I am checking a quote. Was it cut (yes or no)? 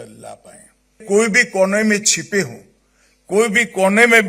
yes